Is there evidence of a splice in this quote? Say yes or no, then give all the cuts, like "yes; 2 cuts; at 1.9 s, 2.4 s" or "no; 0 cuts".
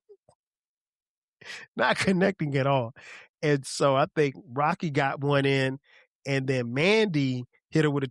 no; 0 cuts